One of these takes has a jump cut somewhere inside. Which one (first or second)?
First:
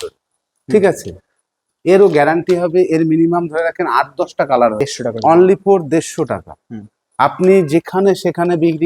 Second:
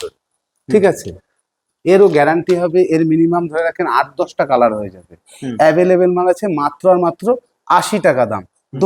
first